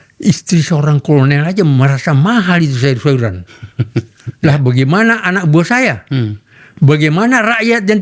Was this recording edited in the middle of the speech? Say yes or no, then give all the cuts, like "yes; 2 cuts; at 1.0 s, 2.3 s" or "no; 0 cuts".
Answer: no; 0 cuts